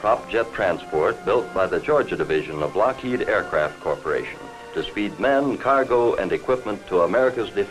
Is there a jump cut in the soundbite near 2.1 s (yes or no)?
yes